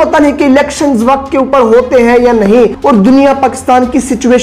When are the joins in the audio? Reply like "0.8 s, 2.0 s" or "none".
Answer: 2.8 s